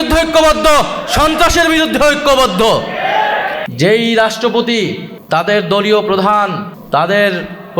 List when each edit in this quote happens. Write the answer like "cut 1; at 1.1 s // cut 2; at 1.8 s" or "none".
cut 1; at 3.6 s // cut 2; at 5.1 s // cut 3; at 6.7 s